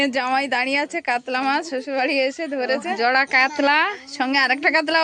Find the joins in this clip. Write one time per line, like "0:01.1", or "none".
0:02.9